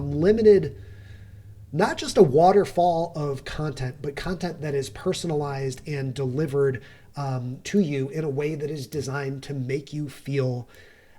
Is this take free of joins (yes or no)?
yes